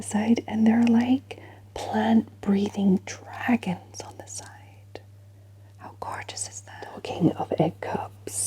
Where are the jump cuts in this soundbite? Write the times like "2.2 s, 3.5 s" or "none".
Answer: 6.9 s